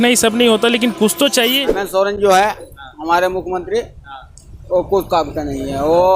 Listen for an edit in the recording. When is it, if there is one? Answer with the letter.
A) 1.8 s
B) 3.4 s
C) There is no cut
A